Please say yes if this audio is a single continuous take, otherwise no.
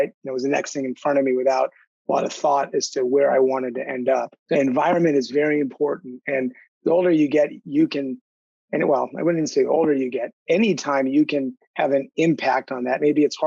no